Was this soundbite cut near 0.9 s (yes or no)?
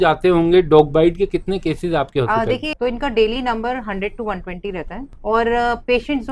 no